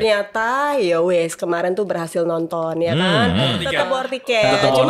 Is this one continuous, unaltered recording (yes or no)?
no